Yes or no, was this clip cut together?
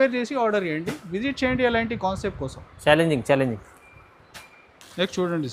no